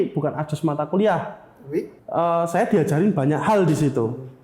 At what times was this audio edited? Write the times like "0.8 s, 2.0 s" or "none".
2.0 s

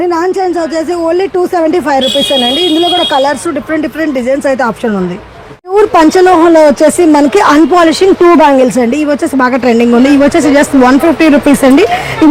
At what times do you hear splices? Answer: none

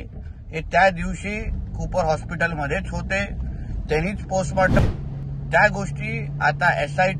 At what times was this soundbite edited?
4.8 s

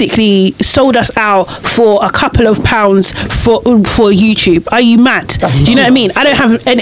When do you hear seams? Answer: none

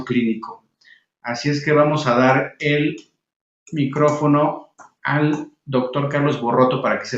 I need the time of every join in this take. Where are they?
6.0 s

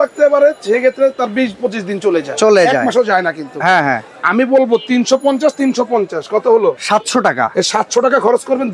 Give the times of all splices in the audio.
none

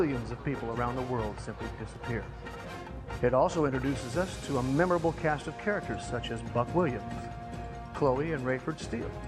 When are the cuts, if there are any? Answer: 4.8 s

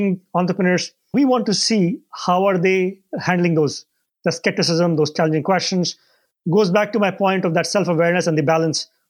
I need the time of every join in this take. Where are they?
1.1 s, 5.1 s

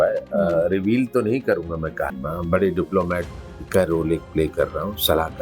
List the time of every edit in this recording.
2.1 s

